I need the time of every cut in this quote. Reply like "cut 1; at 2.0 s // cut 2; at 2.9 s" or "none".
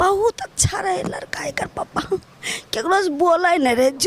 none